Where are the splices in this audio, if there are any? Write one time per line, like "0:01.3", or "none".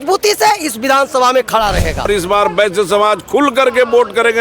0:02.1